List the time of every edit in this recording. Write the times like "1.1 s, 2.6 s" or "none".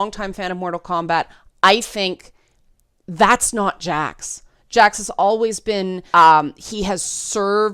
6.0 s

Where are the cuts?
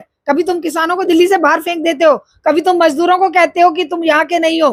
none

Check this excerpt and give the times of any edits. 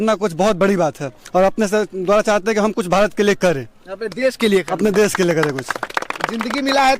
none

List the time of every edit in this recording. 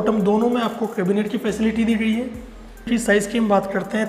2.9 s

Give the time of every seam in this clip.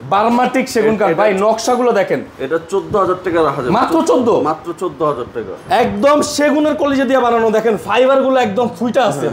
none

